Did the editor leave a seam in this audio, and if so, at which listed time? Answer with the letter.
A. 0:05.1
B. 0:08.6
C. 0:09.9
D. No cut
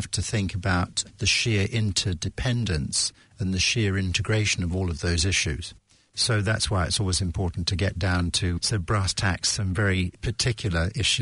B